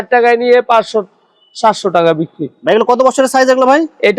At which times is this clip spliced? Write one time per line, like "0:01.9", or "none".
none